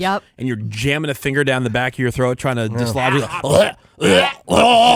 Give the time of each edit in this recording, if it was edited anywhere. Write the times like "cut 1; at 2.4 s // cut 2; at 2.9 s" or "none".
none

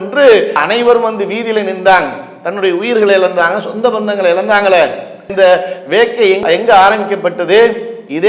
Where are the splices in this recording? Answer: none

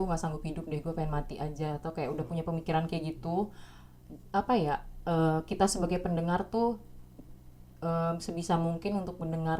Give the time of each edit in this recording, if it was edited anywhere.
none

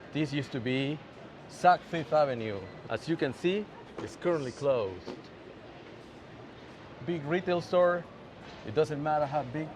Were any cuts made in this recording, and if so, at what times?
cut 1; at 2.7 s

